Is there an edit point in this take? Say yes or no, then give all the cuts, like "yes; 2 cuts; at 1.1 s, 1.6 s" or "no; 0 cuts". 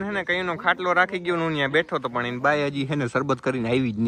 no; 0 cuts